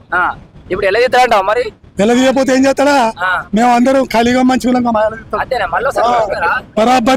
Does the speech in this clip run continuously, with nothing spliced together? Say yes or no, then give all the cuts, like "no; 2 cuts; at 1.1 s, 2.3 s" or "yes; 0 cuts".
yes; 0 cuts